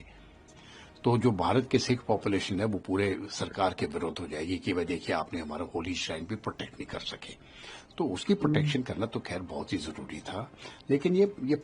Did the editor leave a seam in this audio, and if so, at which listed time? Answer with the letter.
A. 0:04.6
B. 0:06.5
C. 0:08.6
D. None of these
D